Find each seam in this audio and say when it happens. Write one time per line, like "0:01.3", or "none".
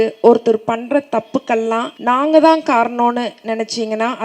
0:01.9